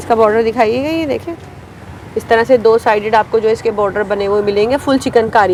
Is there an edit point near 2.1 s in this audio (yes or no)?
no